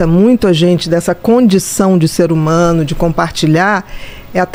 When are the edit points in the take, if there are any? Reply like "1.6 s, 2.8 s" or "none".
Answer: none